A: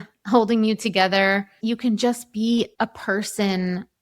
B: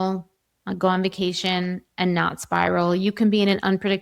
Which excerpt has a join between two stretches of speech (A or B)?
A